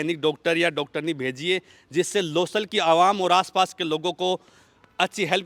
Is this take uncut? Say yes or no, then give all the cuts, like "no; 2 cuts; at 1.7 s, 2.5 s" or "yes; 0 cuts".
yes; 0 cuts